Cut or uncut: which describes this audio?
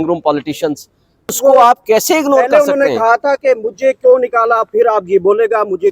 cut